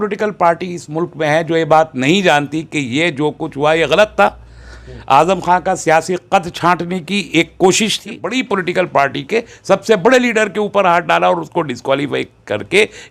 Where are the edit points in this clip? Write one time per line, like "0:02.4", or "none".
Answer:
0:08.3